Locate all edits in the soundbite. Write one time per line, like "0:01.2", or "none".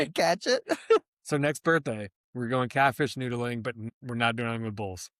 0:03.8